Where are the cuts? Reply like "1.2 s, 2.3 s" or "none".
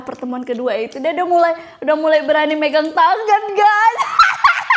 none